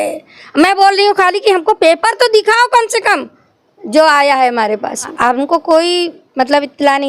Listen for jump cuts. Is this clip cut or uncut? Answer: cut